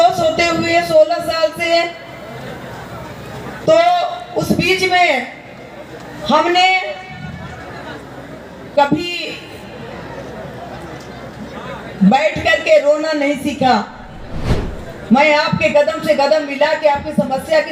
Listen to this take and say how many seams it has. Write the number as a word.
zero